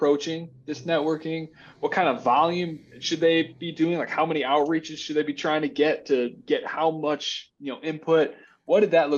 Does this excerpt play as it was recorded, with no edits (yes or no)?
yes